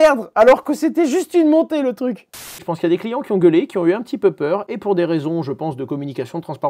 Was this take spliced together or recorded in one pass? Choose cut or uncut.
cut